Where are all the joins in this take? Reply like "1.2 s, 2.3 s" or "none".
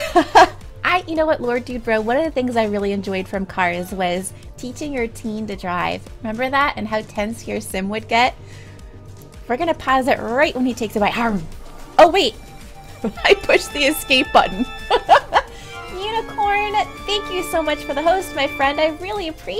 6.1 s

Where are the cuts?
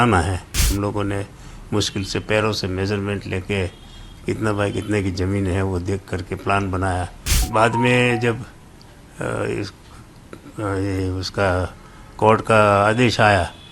0.7 s, 7.4 s

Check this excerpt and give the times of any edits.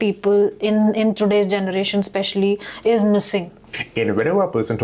3.6 s

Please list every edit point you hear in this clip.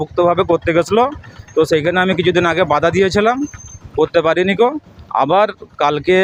none

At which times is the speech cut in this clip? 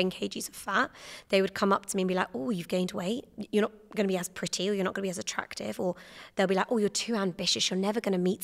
3.3 s

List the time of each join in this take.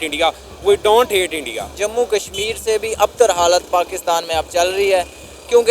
1.8 s

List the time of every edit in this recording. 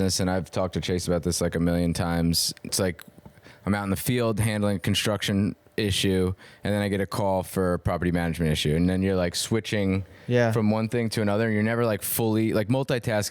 2.7 s

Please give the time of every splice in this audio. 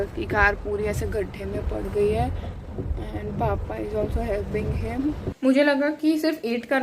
5.3 s

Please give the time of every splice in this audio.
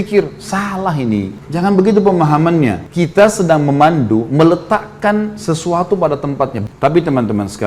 6.6 s

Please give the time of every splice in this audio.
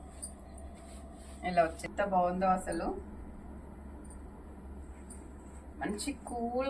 1.9 s

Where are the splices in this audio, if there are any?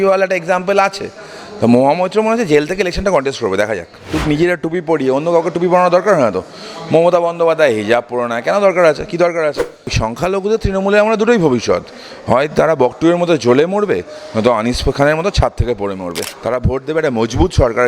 4.1 s, 10.0 s, 16.3 s

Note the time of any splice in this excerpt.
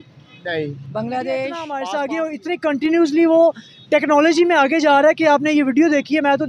1.7 s

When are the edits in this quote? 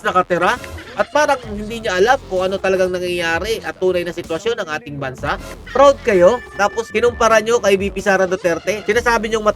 5.5 s, 6.8 s, 8.7 s

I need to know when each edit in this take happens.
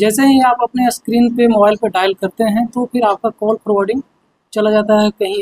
none

